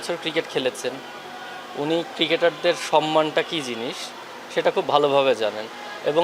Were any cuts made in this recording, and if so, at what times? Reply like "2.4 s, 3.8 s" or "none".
none